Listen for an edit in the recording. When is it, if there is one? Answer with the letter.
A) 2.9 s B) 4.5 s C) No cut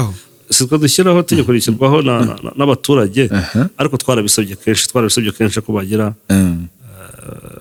C